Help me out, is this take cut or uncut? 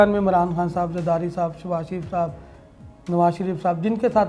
uncut